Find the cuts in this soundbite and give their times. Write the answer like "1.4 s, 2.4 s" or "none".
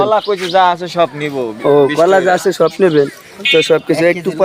none

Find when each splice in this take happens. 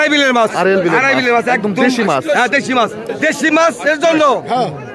3.1 s

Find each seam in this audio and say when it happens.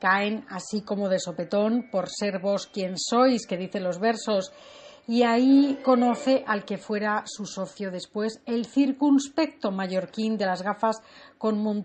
none

